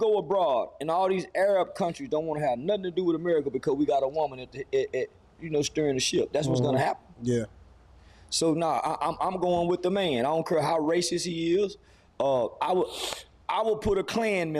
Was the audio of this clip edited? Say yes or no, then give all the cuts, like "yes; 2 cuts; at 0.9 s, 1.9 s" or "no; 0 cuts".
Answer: no; 0 cuts